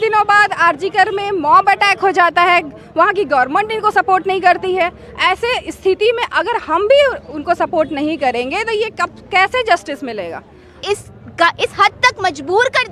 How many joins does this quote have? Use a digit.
1